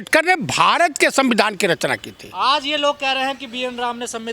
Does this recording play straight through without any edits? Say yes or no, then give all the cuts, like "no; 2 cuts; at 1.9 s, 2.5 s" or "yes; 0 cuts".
yes; 0 cuts